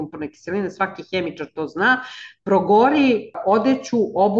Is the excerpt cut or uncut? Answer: cut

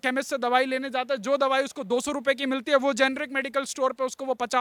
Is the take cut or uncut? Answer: uncut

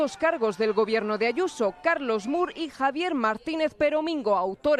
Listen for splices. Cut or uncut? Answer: uncut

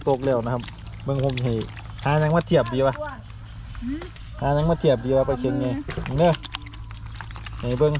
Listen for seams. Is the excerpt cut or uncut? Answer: uncut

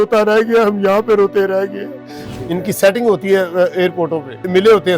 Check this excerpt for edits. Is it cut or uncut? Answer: cut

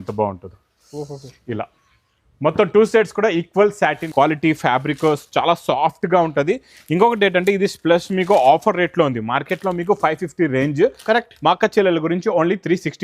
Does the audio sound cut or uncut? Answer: cut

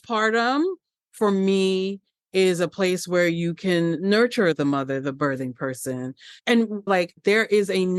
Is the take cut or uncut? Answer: uncut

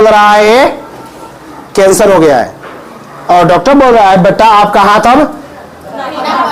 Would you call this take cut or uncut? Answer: uncut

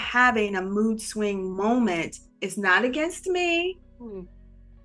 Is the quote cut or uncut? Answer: uncut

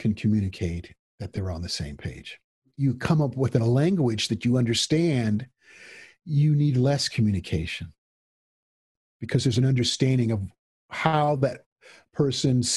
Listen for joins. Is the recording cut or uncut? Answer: cut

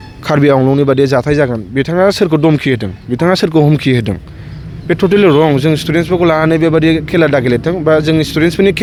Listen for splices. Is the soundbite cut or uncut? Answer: uncut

